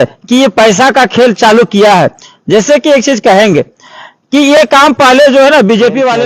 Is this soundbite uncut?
yes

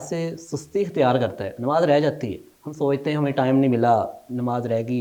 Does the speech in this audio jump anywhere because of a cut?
no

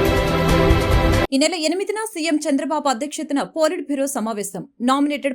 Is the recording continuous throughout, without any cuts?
yes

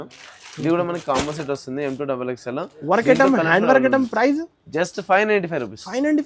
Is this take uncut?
yes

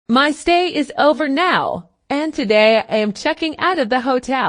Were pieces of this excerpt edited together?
yes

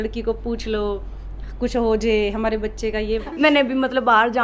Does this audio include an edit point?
yes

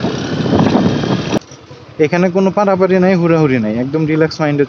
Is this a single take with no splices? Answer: no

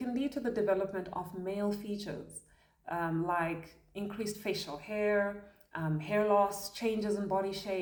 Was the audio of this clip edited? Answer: no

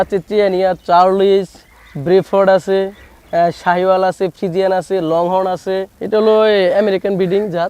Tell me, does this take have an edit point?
yes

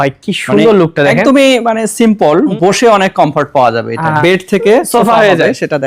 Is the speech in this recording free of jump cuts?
no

